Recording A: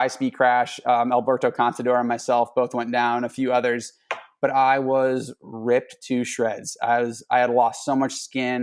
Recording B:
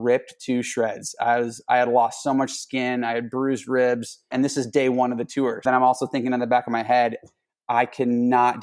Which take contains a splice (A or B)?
B